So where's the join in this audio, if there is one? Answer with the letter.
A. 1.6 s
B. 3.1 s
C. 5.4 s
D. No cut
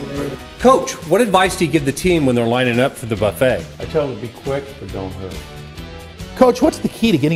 D